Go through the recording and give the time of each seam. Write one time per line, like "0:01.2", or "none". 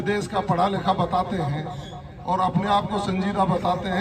none